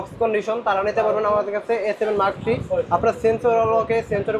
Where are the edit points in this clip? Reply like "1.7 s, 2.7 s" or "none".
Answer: none